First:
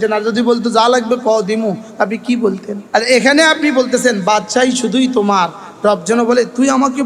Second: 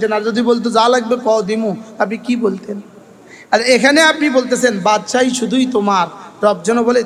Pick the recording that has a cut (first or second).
first